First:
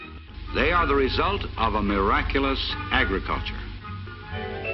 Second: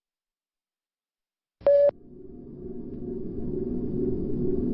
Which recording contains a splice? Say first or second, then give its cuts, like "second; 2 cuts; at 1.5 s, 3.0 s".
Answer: first; 1 cut; at 1.1 s